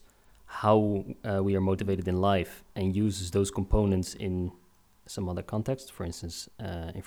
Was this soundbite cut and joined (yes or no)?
no